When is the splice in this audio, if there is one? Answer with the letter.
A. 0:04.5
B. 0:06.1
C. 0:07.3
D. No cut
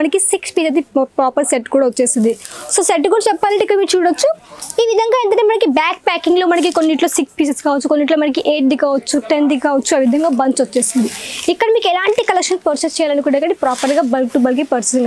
D